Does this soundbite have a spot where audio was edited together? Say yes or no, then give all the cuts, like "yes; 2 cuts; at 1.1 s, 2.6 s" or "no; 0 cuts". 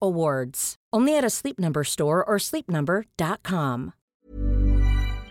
yes; 1 cut; at 4.1 s